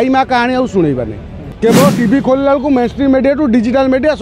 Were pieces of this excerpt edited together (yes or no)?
yes